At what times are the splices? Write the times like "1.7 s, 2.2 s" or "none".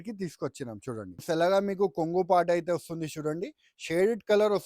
1.2 s